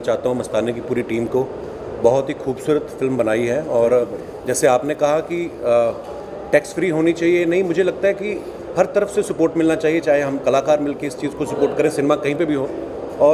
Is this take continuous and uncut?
yes; 0 cuts

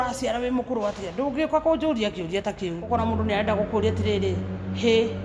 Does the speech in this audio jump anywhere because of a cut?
yes; 1 cut; at 2.8 s

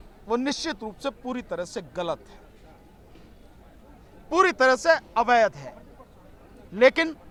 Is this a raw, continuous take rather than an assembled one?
yes; 0 cuts

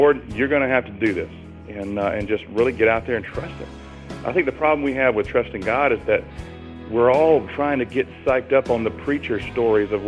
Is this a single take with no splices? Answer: yes; 0 cuts

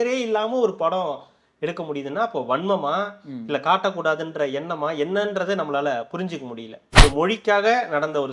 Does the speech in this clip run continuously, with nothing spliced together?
no; 1 cut; at 7.0 s

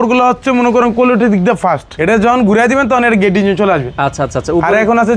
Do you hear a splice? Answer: yes; 1 cut; at 1.9 s

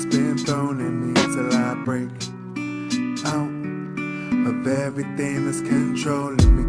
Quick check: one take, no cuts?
yes; 0 cuts

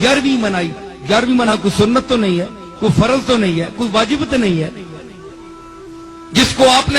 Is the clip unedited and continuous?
no; 1 cut; at 1.5 s

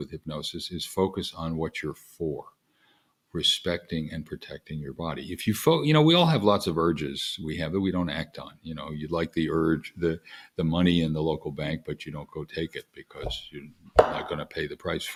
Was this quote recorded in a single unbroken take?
yes; 0 cuts

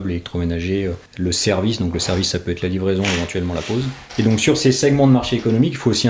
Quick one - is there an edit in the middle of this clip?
yes; 2 cuts; at 1.1 s, 4.0 s

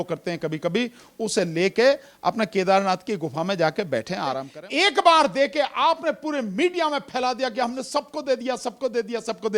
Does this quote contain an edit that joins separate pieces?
yes; 1 cut; at 4.5 s

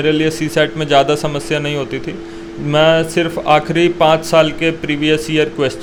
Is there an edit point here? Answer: no; 0 cuts

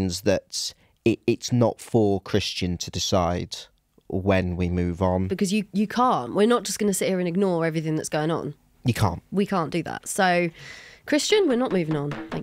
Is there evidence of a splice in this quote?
yes; 1 cut; at 5.3 s

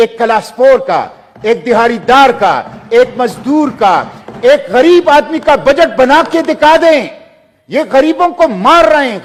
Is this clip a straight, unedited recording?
yes; 0 cuts

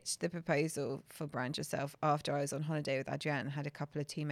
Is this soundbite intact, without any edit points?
yes; 0 cuts

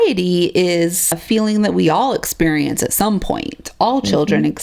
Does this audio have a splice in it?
yes; 1 cut; at 1.2 s

